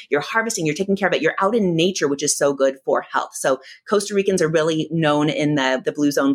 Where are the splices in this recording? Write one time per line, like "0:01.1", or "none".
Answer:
none

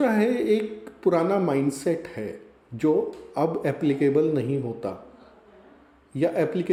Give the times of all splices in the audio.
none

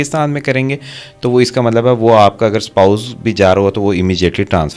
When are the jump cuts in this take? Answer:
none

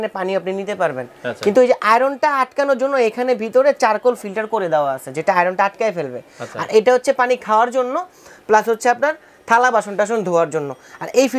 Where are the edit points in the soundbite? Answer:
none

